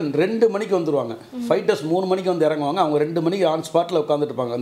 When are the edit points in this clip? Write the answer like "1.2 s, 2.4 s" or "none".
none